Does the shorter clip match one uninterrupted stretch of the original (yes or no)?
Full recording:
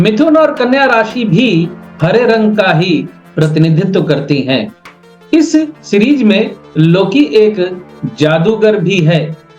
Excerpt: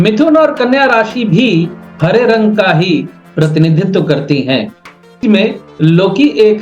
no